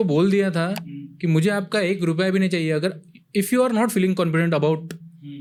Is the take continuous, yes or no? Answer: yes